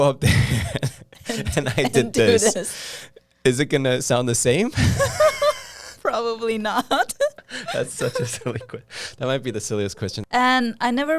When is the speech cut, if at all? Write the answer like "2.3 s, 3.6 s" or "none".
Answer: 10.2 s